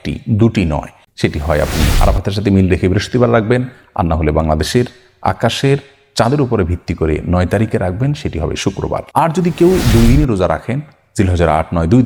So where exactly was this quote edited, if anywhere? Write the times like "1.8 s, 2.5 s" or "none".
1.0 s, 9.1 s